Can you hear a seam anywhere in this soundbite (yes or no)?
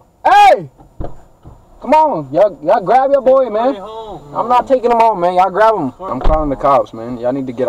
yes